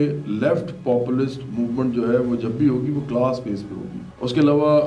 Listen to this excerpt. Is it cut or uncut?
uncut